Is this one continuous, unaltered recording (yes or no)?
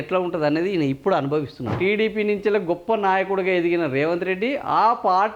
no